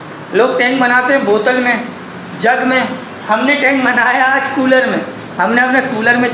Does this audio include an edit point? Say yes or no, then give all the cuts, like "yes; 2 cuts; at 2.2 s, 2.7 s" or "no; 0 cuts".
no; 0 cuts